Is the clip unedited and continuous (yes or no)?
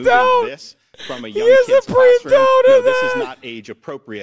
yes